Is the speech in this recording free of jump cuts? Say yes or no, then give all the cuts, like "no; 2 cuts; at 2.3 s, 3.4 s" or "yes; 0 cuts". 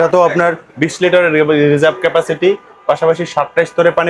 yes; 0 cuts